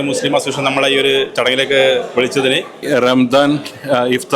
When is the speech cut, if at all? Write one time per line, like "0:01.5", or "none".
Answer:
0:02.7